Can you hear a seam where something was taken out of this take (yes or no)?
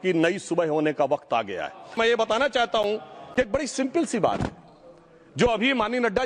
yes